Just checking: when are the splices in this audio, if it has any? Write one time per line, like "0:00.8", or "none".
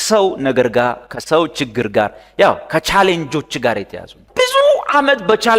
0:04.2